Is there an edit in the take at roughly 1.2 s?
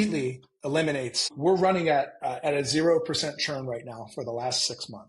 yes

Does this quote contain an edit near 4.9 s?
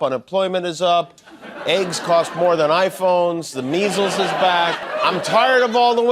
yes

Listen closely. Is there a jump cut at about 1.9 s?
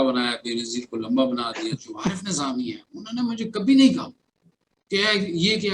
yes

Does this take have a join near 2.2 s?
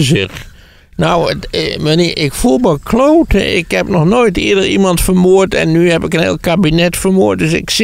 no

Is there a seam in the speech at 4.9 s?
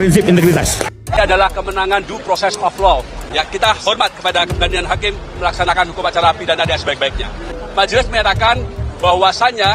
no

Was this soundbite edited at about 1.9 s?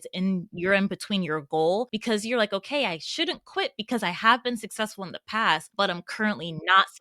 yes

